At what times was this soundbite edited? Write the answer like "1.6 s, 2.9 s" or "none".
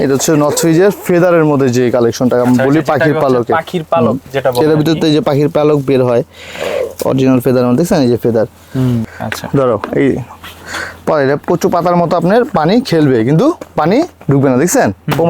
9.1 s